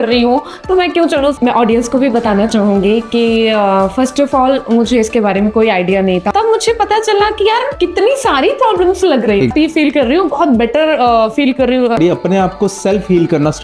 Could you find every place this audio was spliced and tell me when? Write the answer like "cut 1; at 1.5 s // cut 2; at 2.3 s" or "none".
cut 1; at 1.4 s // cut 2; at 6.3 s // cut 3; at 9.5 s // cut 4; at 12.0 s